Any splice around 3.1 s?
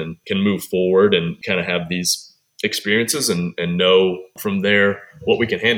no; 2 cuts; at 1.4 s, 4.3 s

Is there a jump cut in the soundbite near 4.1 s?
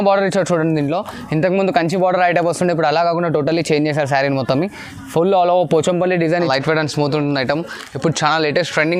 no; 1 cut; at 6.4 s

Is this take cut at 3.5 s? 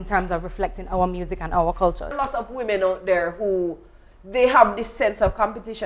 no; 1 cut; at 2.1 s

